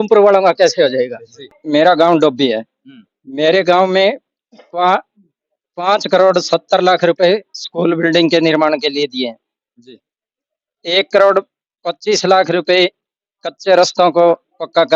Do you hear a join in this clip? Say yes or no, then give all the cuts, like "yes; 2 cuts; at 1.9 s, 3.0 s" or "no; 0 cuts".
yes; 1 cut; at 1.6 s